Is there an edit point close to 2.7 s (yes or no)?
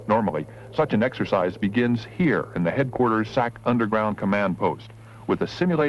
yes